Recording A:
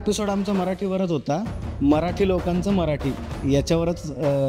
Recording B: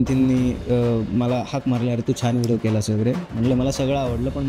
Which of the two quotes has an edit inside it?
A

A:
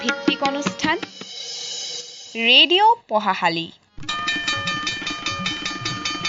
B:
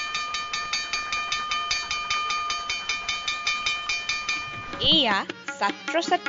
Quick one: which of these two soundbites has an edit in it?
B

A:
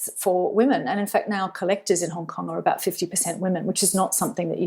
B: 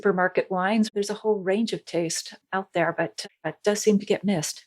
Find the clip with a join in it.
B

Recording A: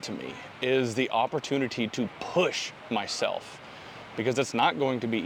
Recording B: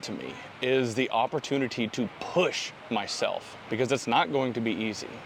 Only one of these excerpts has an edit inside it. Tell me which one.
B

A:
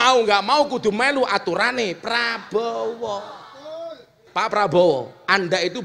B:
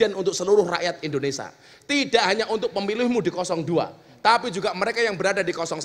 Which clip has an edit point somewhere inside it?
A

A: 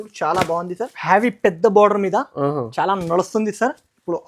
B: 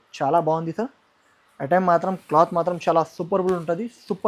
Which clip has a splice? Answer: A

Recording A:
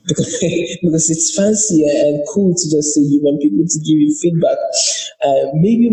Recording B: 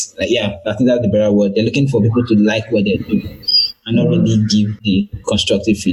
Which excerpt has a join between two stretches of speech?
B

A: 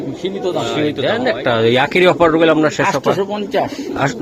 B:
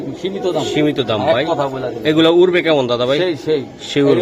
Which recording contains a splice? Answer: A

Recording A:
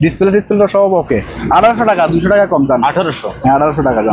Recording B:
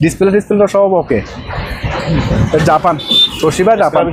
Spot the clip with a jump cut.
A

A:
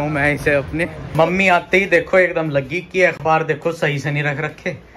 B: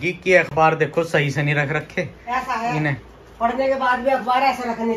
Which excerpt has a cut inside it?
A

